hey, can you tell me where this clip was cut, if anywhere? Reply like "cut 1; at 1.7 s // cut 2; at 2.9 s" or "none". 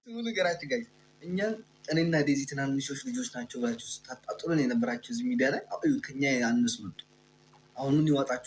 none

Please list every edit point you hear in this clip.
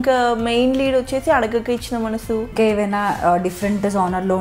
cut 1; at 2.5 s

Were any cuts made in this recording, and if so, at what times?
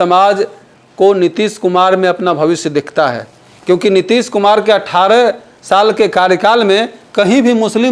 none

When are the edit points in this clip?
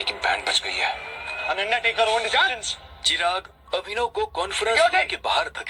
none

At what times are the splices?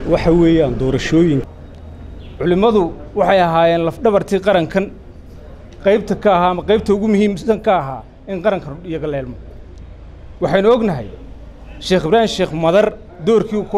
cut 1; at 1.5 s

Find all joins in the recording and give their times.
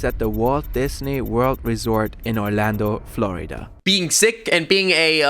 cut 1; at 3.7 s

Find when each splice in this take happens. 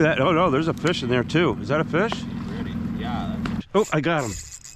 cut 1; at 3.6 s

